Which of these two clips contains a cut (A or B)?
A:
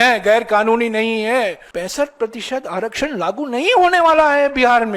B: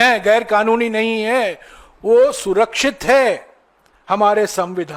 A